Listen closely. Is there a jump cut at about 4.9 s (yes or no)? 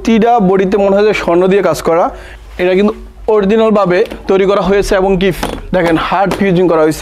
no